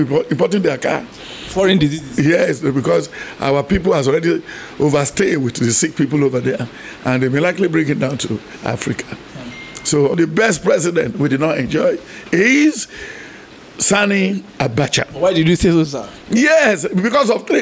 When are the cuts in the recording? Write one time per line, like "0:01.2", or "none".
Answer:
0:10.2